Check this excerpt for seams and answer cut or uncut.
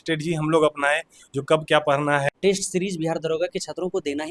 cut